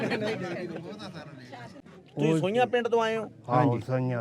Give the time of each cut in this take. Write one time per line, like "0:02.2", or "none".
0:01.8